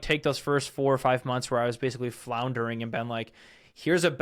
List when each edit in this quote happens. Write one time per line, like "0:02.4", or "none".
none